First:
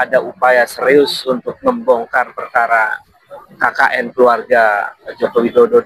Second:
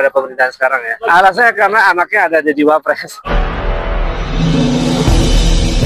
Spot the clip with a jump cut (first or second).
second